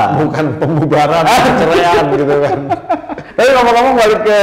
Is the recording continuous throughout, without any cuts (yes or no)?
no